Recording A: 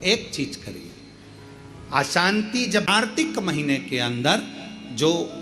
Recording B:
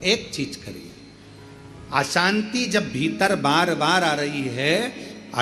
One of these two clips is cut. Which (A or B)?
A